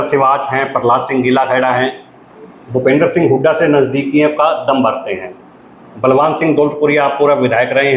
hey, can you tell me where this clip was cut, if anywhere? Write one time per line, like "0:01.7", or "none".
none